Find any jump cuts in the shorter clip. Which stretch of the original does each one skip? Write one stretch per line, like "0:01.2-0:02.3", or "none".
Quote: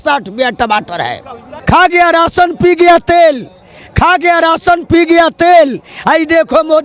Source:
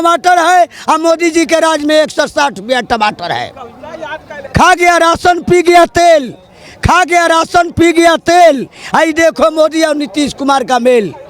0:03.7-0:04.3